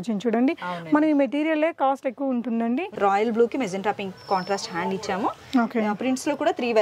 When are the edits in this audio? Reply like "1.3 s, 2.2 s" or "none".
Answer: 2.9 s